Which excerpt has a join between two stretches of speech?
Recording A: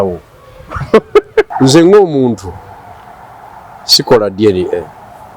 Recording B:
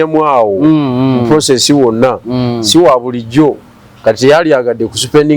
A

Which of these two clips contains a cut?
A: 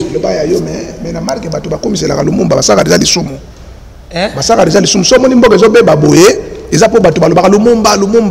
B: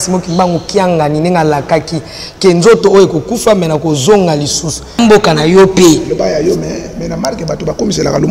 B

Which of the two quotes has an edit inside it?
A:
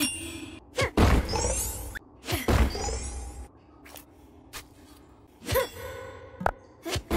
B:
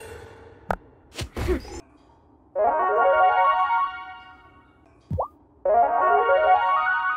B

